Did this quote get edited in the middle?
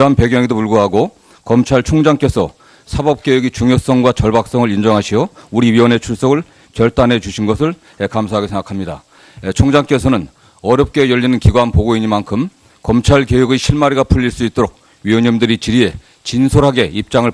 yes; 1 cut; at 10.2 s

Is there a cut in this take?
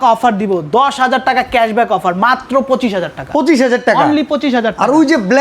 no; 0 cuts

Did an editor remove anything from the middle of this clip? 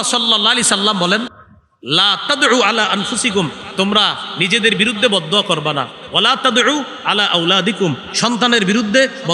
no; 0 cuts

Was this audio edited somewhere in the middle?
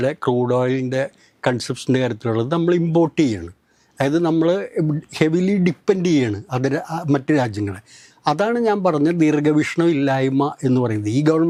no; 0 cuts

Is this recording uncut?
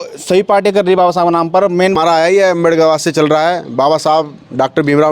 no; 1 cut; at 2.0 s

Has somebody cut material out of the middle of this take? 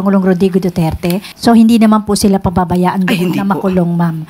yes; 1 cut; at 1.3 s

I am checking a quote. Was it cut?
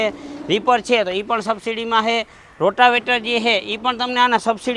no; 0 cuts

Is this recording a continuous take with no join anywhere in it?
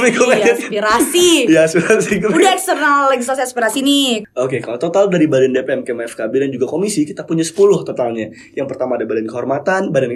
yes; 0 cuts

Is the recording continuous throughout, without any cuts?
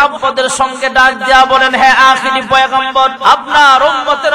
no; 1 cut; at 3.2 s

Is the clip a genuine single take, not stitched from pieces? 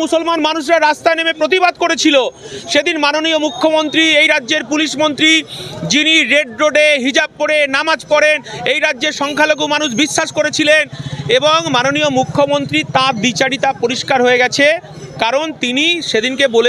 yes; 0 cuts

